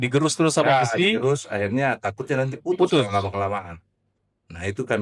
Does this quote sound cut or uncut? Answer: uncut